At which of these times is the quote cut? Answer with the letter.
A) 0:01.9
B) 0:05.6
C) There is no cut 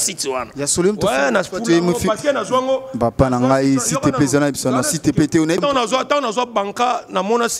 B